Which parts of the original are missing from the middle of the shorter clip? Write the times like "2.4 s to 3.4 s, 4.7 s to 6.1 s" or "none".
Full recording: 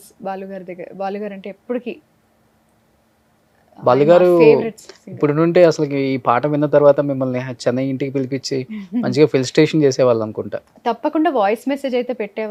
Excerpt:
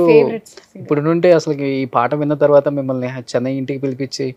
none